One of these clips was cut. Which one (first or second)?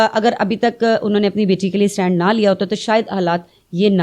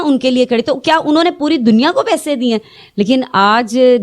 second